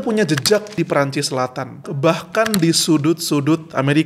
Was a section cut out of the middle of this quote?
yes; 2 cuts; at 0.7 s, 1.9 s

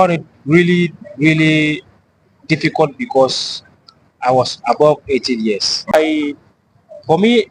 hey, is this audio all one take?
no; 1 cut; at 5.9 s

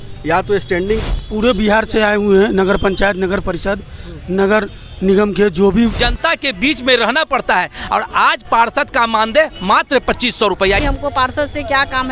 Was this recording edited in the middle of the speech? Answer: yes; 3 cuts; at 1.0 s, 6.1 s, 10.8 s

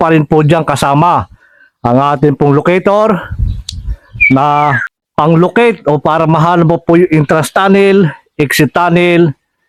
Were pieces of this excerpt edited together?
no; 0 cuts

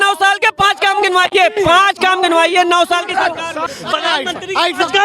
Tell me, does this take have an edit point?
yes; 1 cut; at 3.7 s

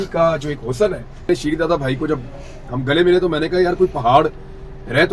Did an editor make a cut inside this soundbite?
yes; 1 cut; at 1.3 s

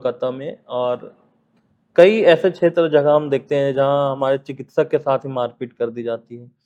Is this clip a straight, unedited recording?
yes; 0 cuts

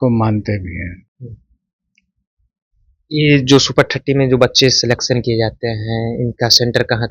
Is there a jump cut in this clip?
no; 0 cuts

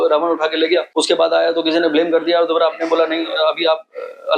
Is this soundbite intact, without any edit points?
no; 1 cut; at 0.9 s

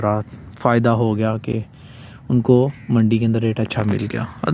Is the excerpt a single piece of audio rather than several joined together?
yes; 0 cuts

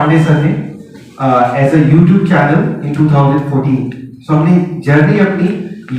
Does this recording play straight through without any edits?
yes; 0 cuts

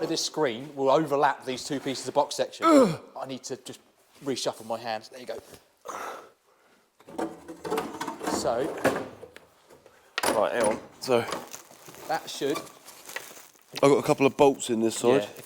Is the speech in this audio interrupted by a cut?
no; 0 cuts

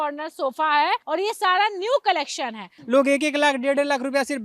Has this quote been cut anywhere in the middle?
yes; 2 cuts; at 1.0 s, 2.7 s

